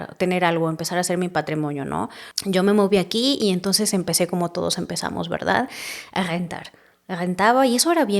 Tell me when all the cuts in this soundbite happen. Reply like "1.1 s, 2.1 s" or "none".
2.3 s